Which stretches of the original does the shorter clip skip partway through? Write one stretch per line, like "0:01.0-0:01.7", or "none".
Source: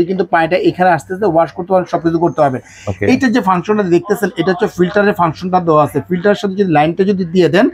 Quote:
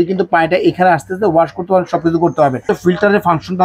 0:02.6-0:04.6